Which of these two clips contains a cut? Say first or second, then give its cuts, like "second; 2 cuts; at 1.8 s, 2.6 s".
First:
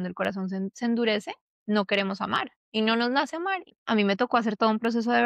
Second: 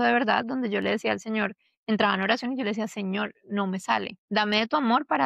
first; 1 cut; at 3.7 s